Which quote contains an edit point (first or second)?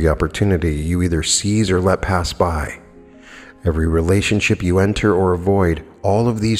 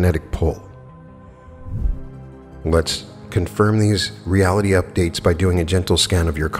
second